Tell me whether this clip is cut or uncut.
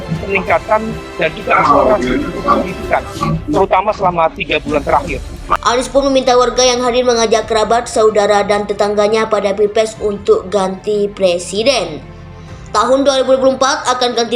cut